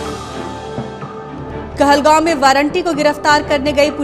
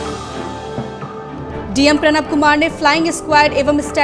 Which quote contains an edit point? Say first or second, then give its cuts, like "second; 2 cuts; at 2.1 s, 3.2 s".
second; 1 cut; at 1.5 s